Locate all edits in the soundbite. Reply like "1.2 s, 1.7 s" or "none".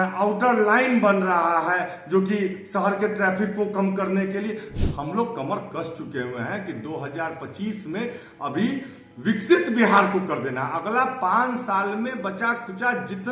4.7 s